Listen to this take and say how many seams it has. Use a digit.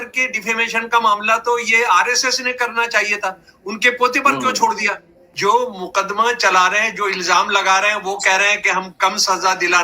1